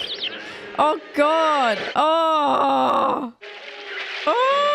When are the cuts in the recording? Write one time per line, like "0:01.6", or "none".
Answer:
0:03.5